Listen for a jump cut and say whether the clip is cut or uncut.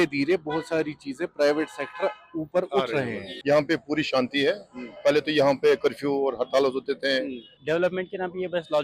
cut